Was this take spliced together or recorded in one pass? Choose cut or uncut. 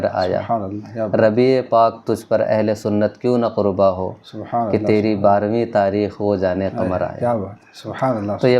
uncut